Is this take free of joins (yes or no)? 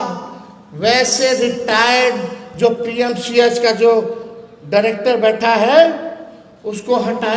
yes